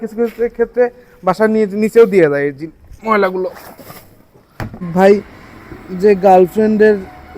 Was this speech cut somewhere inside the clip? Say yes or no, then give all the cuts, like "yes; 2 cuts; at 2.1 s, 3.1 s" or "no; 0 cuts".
yes; 1 cut; at 4.9 s